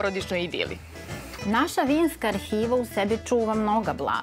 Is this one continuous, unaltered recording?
no; 1 cut; at 1.0 s

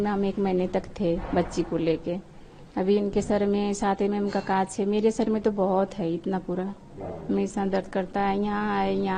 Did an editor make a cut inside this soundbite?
no; 0 cuts

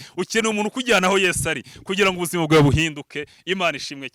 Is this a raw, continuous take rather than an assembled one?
yes; 0 cuts

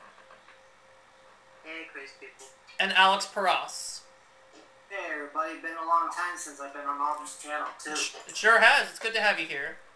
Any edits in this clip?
no; 0 cuts

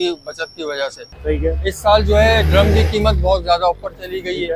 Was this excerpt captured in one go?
no; 1 cut; at 1.1 s

